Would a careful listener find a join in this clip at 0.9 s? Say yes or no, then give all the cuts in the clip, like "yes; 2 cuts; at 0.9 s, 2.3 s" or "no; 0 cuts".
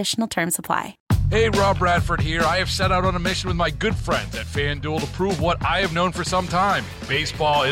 yes; 1 cut; at 0.9 s